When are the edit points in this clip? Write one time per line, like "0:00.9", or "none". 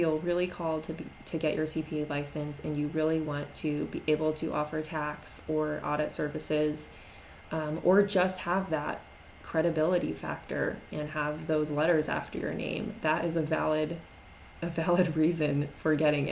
none